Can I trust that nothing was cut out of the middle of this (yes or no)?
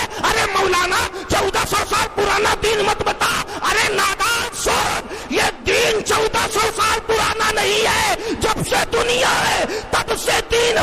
yes